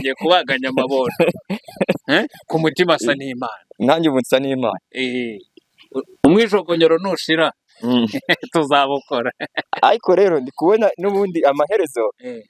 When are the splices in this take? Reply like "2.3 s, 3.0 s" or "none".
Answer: 5.7 s